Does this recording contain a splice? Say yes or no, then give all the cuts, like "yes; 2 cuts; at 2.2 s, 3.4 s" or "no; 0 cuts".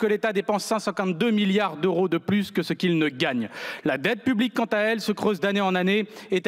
no; 0 cuts